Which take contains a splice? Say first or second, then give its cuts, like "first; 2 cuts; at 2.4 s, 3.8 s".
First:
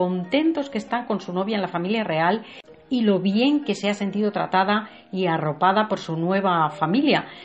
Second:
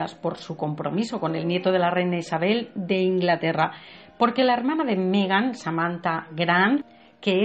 first; 1 cut; at 5.5 s